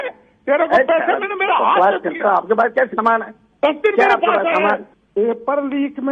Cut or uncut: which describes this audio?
cut